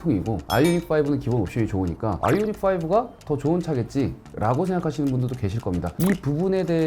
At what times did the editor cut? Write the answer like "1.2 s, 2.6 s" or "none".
5.9 s